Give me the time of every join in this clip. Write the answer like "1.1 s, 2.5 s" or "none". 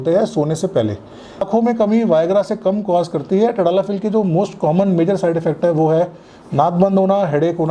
1.5 s